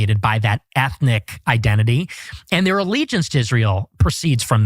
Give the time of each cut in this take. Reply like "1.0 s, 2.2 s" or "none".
none

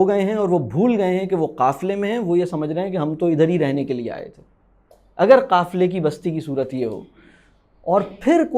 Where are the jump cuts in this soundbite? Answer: none

